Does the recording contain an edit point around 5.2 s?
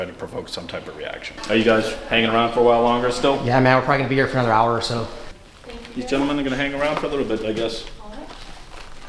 yes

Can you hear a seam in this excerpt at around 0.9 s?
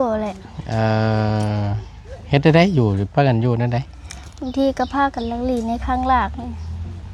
no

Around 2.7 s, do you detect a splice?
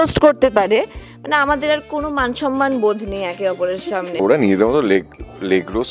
no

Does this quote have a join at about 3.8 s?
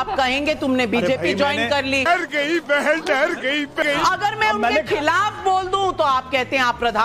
yes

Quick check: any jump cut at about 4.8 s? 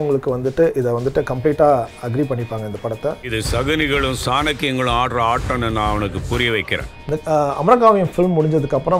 no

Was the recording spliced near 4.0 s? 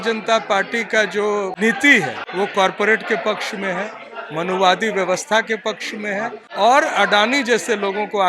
no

